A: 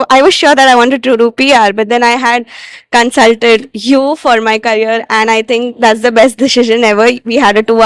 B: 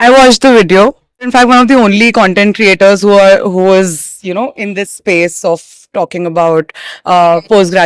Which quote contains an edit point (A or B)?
B